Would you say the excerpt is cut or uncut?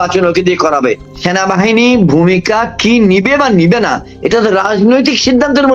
cut